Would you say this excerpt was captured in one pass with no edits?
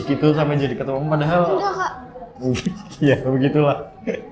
yes; 0 cuts

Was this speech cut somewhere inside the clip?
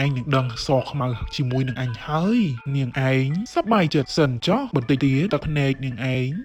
no; 0 cuts

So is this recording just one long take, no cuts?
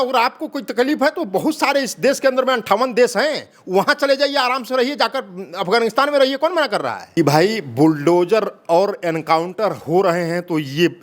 no; 1 cut; at 7.0 s

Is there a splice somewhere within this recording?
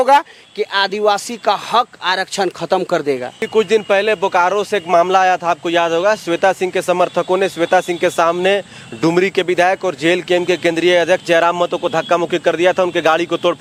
no; 0 cuts

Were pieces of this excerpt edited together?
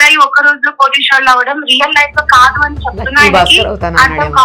no; 0 cuts

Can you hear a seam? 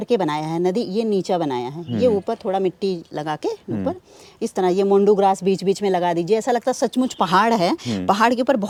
no; 0 cuts

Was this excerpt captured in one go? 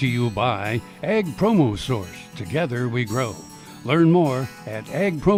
yes; 0 cuts

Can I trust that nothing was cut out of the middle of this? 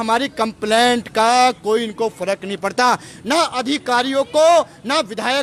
yes; 0 cuts

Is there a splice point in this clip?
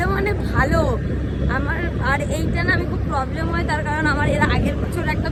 no; 0 cuts

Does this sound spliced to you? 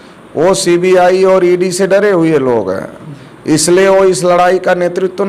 no; 0 cuts

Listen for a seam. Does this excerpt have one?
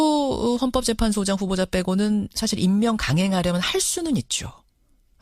no; 0 cuts

